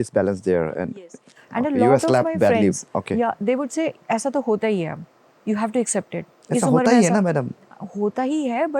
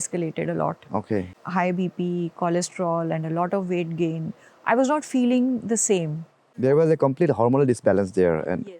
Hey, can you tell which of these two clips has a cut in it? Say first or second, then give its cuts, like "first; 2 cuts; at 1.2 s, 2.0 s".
second; 2 cuts; at 1.4 s, 6.6 s